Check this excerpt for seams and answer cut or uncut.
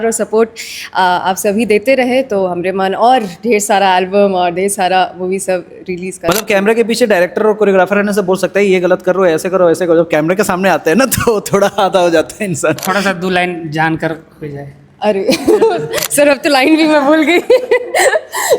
cut